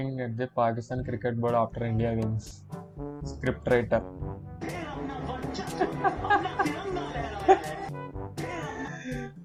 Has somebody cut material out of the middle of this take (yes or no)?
no